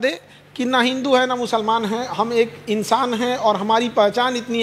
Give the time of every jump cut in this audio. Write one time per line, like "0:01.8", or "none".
none